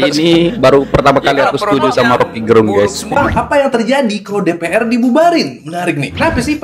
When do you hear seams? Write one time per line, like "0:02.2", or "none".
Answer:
0:03.1